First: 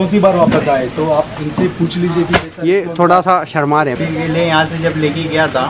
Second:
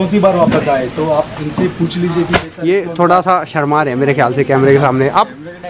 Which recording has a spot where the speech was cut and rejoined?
first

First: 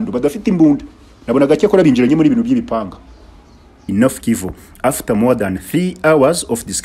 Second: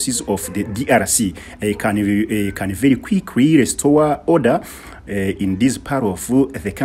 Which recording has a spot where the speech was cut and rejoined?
first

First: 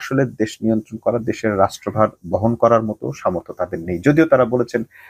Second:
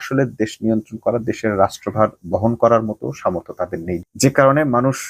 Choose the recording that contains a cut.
second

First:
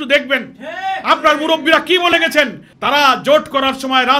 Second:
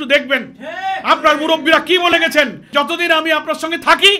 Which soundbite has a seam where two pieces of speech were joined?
second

